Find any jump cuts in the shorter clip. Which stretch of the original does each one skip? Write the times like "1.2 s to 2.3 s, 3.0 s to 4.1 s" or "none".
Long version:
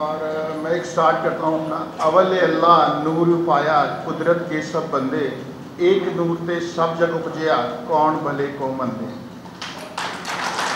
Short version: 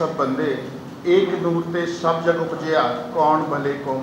none